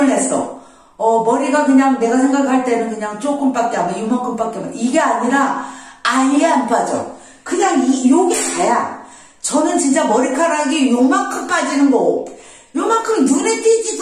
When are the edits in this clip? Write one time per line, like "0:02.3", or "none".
none

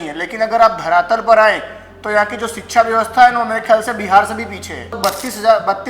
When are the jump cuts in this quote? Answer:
0:05.0

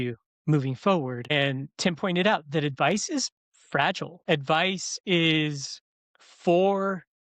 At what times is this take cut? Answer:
0:01.2
0:04.1

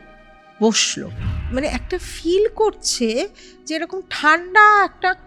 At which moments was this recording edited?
0:01.3

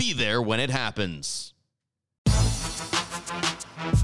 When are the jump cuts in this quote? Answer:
0:02.2

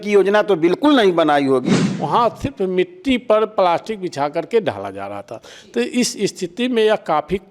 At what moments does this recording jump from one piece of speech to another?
0:01.9

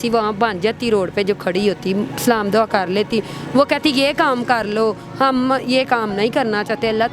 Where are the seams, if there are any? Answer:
none

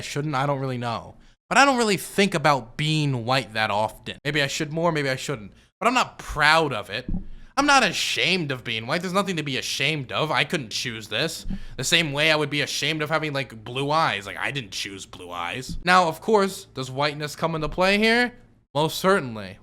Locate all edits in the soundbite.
0:04.1
0:15.8

